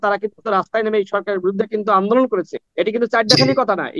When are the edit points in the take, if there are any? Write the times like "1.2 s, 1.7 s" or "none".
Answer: 2.6 s